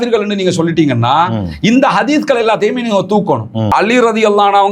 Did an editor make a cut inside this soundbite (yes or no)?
yes